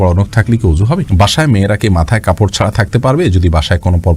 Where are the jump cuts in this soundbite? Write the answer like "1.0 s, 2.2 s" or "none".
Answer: 1.1 s